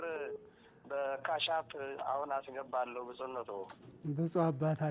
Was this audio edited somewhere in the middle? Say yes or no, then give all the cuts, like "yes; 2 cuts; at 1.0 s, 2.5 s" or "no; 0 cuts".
no; 0 cuts